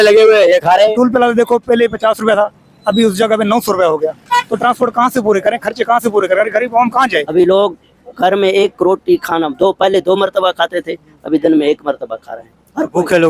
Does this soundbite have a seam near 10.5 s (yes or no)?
no